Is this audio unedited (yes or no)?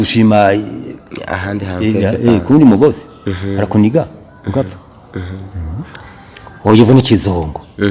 no